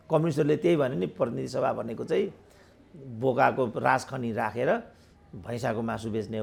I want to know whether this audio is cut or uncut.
uncut